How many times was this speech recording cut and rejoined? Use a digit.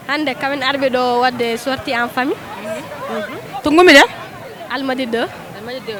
0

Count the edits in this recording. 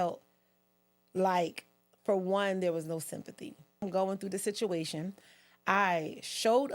1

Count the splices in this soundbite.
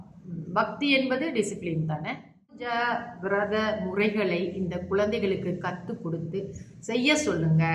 1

